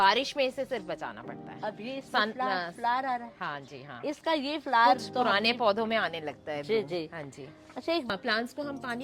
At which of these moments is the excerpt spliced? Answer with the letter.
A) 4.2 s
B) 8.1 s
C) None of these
B